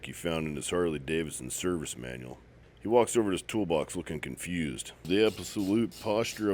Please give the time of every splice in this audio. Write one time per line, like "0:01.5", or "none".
0:02.6
0:04.9